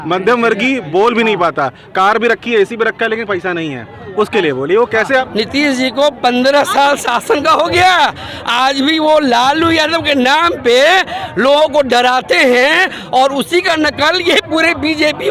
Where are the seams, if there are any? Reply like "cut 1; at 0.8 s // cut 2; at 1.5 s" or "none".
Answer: cut 1; at 5.3 s